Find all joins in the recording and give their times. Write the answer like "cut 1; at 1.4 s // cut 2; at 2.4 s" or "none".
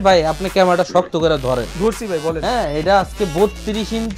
none

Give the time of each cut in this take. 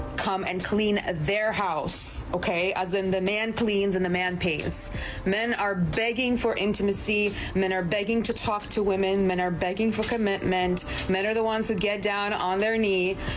none

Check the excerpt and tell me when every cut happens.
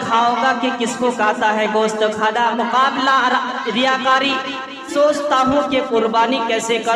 cut 1; at 4.9 s

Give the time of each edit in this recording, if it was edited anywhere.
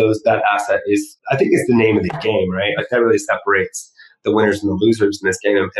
cut 1; at 1.1 s

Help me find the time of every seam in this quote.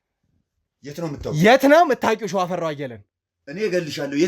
none

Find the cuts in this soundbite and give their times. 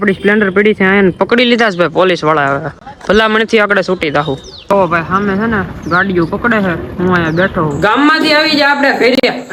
none

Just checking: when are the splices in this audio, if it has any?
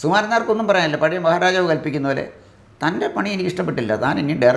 none

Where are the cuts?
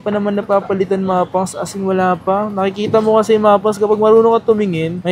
none

